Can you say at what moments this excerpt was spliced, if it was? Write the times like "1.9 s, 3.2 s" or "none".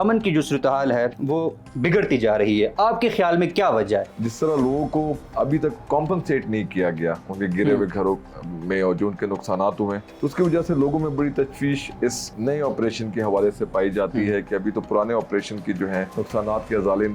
1.2 s, 4.1 s, 5.2 s, 10.1 s, 12.4 s, 16.1 s